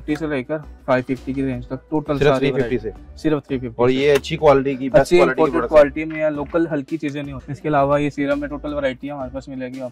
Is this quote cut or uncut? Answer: cut